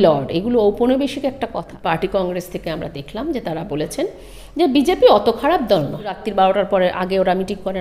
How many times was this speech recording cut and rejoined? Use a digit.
2